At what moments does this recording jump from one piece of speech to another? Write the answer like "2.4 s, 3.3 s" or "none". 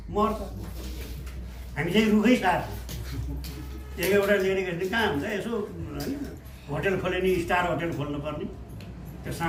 none